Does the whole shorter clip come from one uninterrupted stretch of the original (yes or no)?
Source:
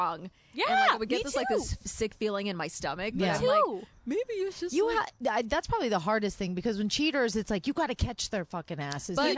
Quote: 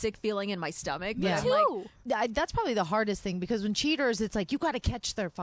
no